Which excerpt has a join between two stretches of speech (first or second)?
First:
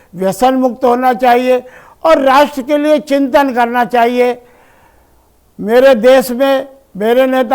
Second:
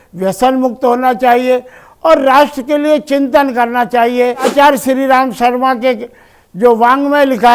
second